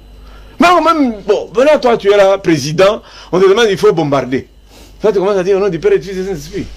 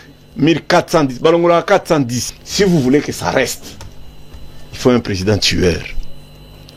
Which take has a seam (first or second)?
second